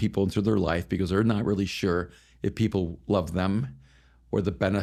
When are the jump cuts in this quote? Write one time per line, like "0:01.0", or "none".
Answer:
none